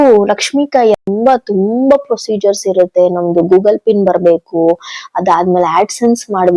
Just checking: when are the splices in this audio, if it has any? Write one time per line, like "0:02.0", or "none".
0:01.0